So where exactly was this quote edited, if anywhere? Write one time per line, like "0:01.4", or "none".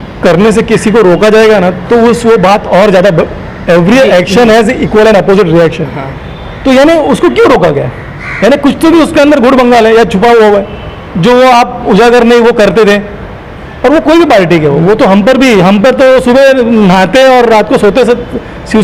none